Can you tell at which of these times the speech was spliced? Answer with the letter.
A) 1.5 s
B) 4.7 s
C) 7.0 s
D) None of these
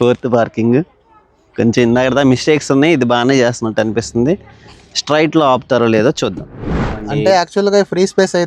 C